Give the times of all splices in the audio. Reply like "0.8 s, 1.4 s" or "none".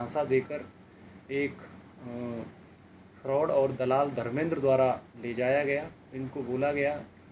none